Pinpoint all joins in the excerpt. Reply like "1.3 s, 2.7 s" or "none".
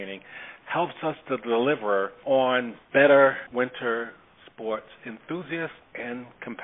2.1 s, 2.8 s, 3.4 s